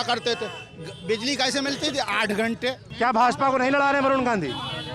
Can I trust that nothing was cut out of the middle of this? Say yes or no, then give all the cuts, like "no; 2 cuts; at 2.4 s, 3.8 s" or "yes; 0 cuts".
no; 1 cut; at 2.8 s